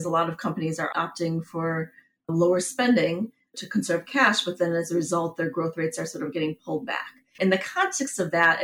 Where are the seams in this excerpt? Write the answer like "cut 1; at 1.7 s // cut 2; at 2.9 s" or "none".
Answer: none